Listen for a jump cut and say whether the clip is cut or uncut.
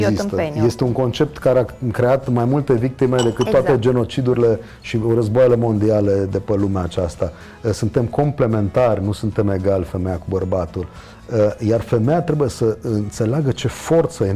uncut